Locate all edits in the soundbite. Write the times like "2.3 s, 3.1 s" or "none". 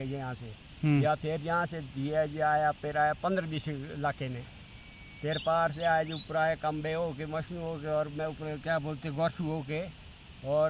none